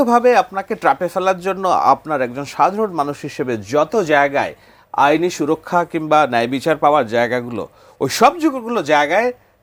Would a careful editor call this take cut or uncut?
uncut